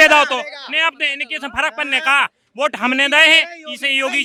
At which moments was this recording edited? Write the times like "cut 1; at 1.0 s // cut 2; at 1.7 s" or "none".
none